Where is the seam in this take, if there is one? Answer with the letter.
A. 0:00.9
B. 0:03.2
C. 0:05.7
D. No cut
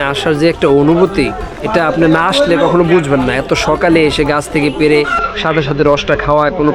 D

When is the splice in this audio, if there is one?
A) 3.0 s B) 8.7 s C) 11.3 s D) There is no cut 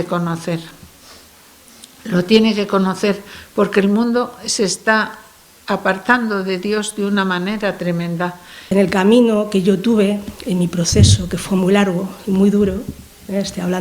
B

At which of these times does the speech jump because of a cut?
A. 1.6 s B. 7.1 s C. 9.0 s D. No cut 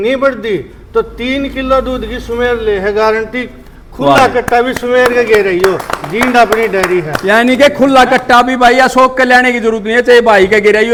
D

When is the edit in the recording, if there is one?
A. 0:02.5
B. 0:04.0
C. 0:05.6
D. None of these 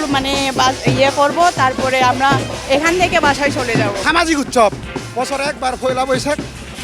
B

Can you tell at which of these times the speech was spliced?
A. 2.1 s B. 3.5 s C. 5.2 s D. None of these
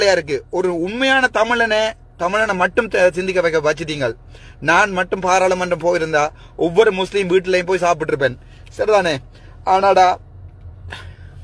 D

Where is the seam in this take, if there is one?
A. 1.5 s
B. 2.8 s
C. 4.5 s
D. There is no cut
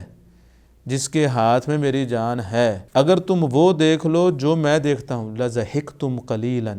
B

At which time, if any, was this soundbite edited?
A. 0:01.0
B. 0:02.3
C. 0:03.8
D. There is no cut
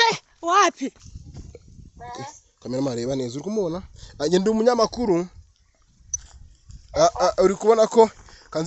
A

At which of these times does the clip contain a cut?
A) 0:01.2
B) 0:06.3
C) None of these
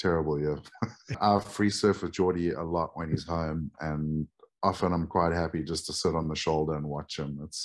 A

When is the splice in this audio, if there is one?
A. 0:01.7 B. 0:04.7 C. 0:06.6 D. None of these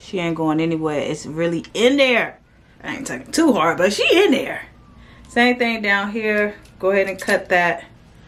D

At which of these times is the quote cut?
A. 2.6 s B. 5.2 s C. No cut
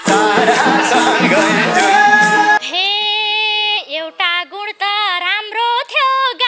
A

